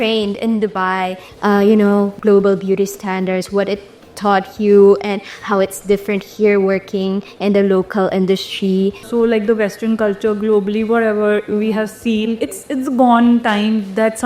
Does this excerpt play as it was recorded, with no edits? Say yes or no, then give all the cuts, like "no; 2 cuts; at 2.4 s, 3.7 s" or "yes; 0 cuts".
no; 3 cuts; at 1.2 s, 2.2 s, 9.1 s